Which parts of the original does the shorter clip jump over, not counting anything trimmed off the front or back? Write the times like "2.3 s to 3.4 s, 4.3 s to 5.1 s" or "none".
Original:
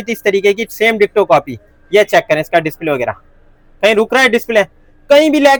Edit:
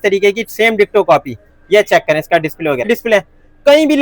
3.1 s to 4.3 s